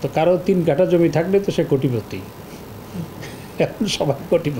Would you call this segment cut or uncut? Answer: uncut